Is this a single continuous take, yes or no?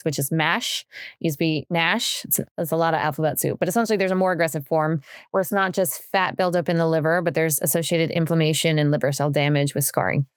yes